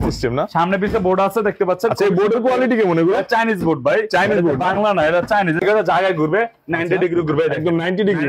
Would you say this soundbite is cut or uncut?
cut